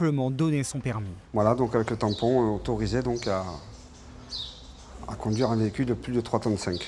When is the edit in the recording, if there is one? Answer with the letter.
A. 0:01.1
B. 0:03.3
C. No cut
A